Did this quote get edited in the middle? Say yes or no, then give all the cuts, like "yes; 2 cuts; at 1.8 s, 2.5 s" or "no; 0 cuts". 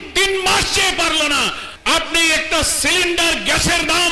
yes; 1 cut; at 1.7 s